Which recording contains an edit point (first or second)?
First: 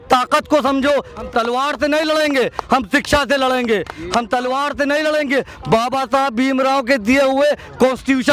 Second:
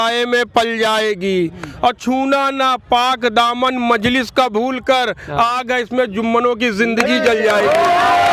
first